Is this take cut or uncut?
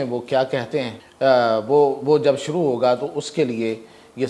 cut